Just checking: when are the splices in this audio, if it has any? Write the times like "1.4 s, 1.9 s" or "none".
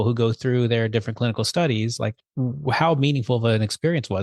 2.2 s